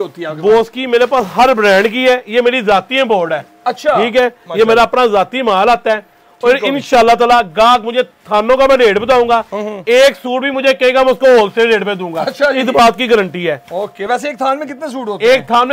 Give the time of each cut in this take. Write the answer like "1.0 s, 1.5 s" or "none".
none